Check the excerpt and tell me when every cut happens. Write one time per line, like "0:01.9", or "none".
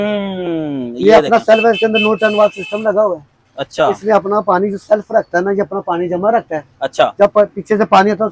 none